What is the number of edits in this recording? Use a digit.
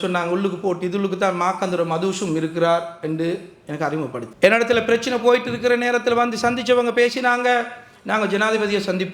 1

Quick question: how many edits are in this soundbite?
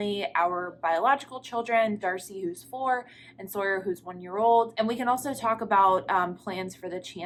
0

